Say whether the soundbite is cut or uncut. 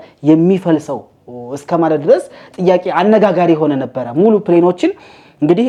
uncut